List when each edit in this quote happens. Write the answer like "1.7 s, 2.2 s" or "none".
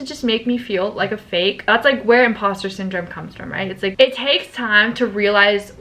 1.6 s, 3.9 s